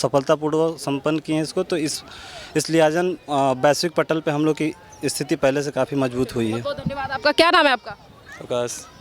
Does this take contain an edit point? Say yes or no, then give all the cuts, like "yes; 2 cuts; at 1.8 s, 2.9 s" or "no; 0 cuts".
no; 0 cuts